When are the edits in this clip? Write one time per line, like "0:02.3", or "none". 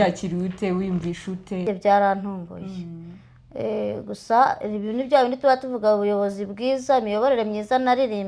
0:01.6